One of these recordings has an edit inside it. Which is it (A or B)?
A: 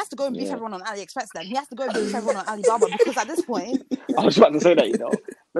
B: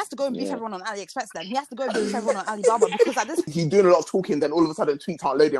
B